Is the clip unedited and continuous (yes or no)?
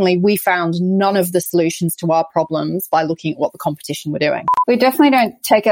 no